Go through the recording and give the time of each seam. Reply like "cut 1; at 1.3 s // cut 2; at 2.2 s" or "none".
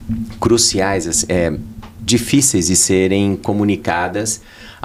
none